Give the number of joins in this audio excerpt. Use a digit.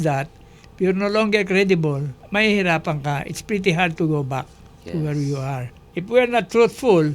2